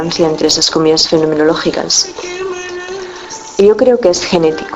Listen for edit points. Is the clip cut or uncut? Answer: cut